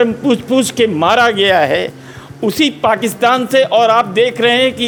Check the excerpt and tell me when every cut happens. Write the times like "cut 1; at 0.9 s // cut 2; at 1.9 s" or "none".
none